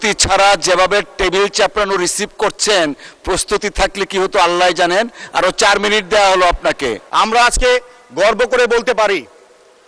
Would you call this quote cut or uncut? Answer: cut